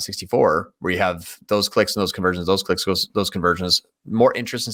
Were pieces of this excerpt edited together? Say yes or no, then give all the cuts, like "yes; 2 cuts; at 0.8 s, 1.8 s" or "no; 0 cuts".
no; 0 cuts